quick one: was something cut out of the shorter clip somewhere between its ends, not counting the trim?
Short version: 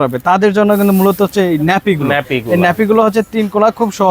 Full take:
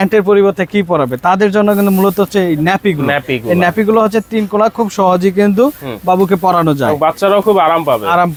no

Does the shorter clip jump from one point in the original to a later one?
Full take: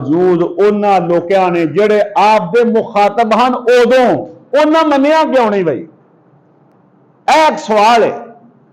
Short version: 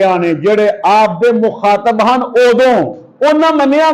no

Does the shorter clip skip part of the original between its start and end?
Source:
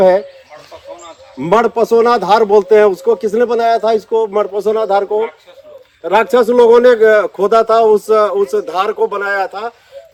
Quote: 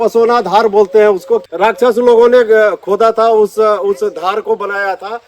yes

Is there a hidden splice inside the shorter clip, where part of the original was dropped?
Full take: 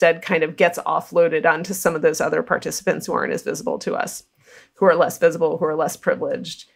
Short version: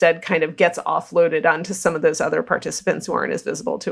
no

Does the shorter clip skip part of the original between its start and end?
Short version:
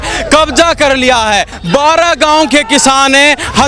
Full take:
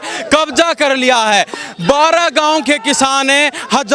yes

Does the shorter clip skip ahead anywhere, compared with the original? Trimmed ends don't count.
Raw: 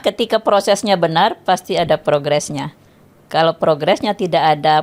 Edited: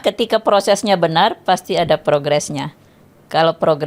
no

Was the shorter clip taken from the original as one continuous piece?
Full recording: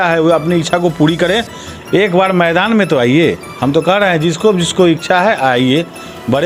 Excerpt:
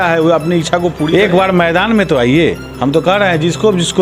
no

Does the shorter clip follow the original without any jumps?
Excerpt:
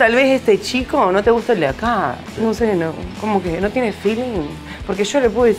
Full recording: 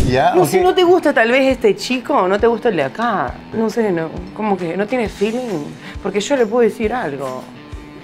yes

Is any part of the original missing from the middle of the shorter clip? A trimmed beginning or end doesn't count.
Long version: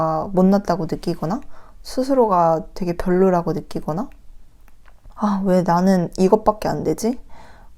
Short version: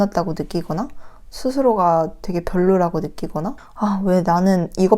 yes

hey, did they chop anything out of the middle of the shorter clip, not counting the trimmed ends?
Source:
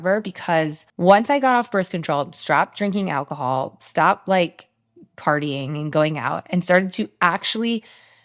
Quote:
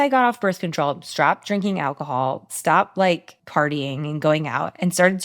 yes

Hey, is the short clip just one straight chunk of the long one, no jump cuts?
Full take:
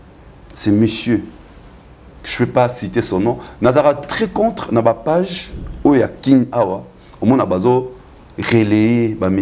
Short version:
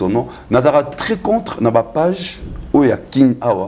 yes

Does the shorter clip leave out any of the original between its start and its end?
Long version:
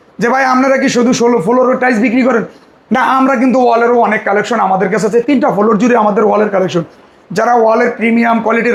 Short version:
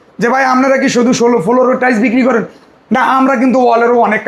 no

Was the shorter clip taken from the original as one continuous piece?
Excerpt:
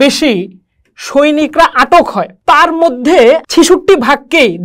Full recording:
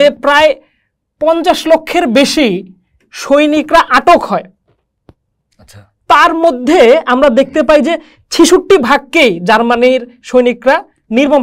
no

